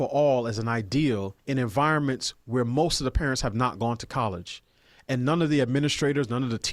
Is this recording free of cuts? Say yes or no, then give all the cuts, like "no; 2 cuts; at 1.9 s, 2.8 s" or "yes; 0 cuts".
no; 1 cut; at 1.4 s